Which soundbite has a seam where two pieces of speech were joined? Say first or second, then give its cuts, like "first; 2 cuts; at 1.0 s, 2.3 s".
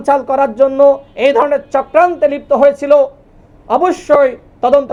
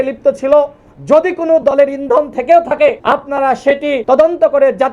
second; 2 cuts; at 3.0 s, 4.0 s